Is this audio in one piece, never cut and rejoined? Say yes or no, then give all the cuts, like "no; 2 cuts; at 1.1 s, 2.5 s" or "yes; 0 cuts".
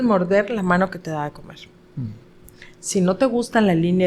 yes; 0 cuts